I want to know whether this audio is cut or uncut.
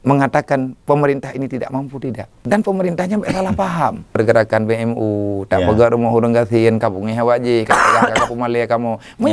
cut